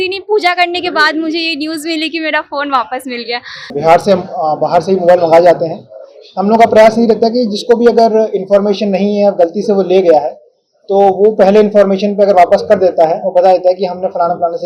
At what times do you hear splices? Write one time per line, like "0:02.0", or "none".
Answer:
0:03.7